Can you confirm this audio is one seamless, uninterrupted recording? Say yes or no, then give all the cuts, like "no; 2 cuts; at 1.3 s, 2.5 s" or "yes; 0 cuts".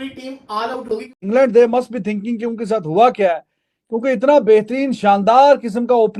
no; 1 cut; at 1.2 s